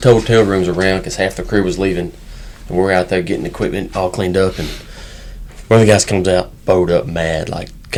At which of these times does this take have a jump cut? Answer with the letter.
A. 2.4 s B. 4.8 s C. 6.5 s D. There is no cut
D